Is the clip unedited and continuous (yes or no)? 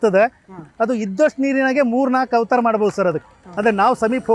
no